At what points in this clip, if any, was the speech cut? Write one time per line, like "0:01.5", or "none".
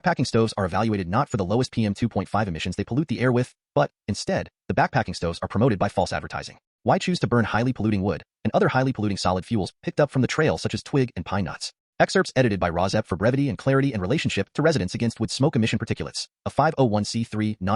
none